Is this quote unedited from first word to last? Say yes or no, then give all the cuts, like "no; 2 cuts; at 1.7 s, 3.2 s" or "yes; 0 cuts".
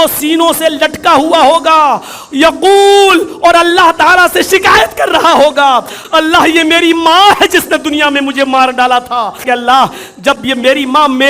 no; 2 cuts; at 6.0 s, 9.4 s